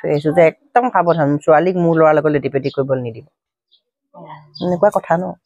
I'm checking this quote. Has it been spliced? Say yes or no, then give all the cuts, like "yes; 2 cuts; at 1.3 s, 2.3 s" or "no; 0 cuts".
no; 0 cuts